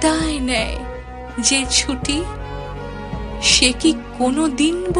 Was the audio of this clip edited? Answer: yes; 2 cuts; at 2.3 s, 3.6 s

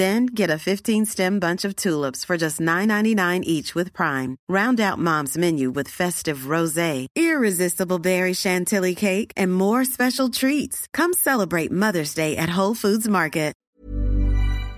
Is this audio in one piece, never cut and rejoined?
no; 1 cut; at 13.6 s

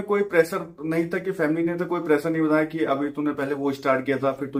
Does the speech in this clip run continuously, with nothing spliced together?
yes; 0 cuts

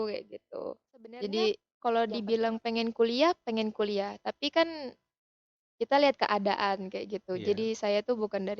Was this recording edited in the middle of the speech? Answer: yes; 1 cut; at 1.7 s

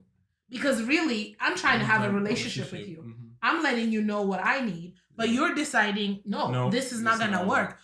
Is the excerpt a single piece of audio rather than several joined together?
yes; 0 cuts

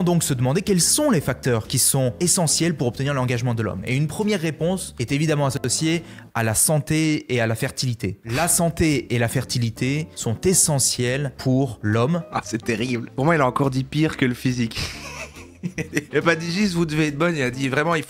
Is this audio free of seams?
yes; 0 cuts

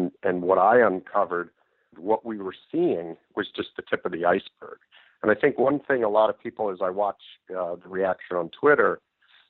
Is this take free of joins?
no; 1 cut; at 1.9 s

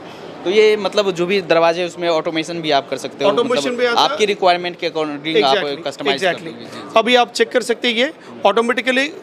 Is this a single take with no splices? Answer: yes; 0 cuts

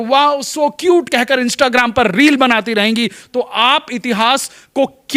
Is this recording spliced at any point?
no; 0 cuts

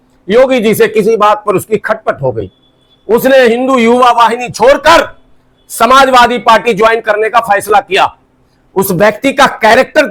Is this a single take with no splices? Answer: yes; 0 cuts

